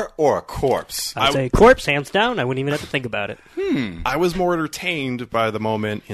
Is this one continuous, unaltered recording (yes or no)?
yes